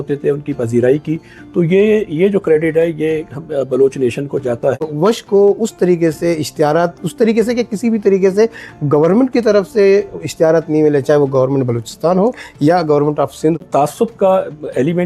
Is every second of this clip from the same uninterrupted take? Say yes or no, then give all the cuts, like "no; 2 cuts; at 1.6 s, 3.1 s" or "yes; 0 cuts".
no; 2 cuts; at 4.8 s, 13.6 s